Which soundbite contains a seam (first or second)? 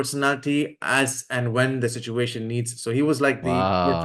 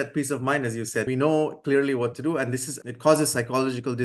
second